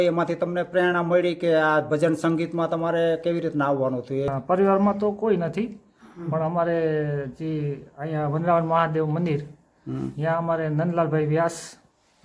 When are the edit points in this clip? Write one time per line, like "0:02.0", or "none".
0:04.3